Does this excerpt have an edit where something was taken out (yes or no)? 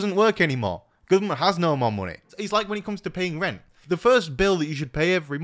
yes